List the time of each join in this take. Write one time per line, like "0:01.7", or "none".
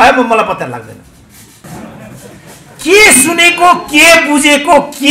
0:01.7